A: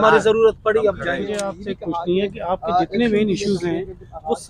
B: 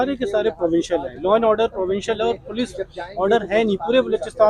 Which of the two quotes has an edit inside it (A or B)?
A